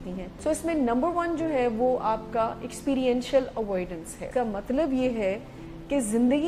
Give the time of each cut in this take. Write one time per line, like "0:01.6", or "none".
0:04.2